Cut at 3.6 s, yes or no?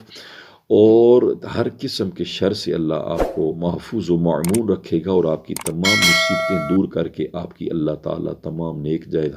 yes